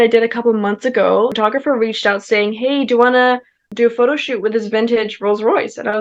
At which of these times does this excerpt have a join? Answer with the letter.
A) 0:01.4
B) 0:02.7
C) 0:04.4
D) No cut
A